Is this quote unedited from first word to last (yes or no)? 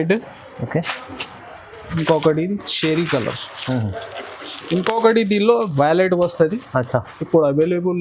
yes